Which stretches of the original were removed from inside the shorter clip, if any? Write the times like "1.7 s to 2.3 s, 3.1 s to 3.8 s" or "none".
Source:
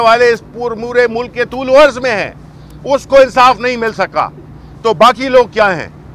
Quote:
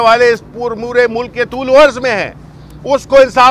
none